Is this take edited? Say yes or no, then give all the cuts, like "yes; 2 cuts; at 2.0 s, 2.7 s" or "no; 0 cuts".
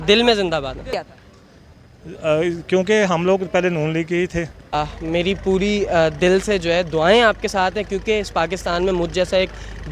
yes; 2 cuts; at 1.1 s, 4.7 s